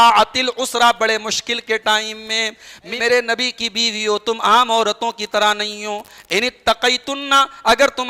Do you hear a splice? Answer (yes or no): yes